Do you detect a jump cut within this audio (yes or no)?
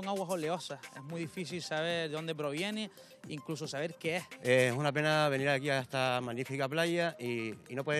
yes